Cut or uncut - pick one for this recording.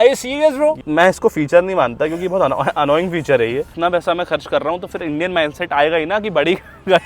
cut